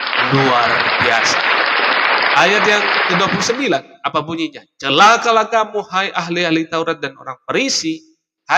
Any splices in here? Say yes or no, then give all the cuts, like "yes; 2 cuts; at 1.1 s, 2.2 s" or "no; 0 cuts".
no; 0 cuts